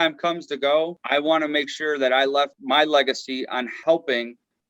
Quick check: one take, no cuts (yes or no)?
no